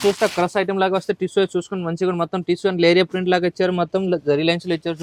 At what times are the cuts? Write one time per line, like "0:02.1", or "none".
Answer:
none